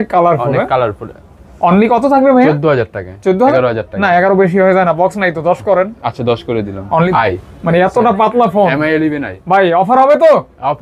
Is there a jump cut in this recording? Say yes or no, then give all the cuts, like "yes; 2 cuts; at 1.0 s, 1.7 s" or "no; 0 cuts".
yes; 2 cuts; at 3.5 s, 7.1 s